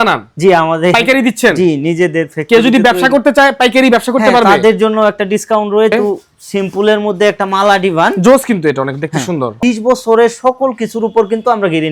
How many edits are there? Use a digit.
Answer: 2